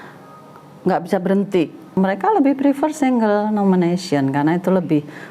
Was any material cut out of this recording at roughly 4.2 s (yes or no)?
no